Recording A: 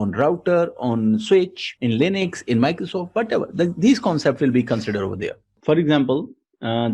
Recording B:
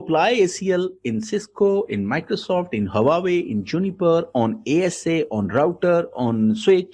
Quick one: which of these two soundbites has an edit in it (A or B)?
A